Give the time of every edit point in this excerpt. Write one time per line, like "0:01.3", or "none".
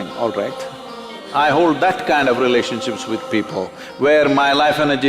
0:01.2